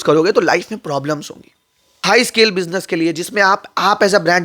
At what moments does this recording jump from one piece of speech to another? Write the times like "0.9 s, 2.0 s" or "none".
1.9 s